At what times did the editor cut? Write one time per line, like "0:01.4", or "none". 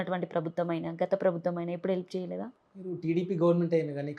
none